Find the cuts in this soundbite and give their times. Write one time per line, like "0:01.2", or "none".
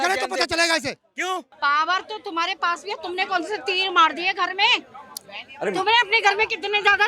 0:01.5

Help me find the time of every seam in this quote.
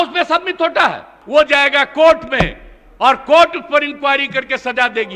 0:01.1

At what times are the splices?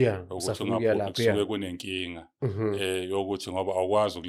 none

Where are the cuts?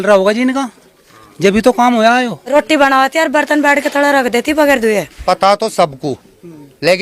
0:02.5
0:05.1

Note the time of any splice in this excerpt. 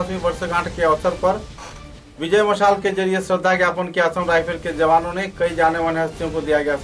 none

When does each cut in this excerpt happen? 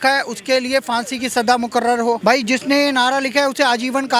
0:02.2

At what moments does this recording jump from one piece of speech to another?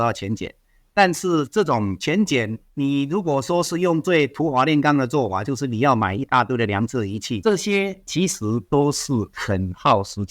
0:07.3

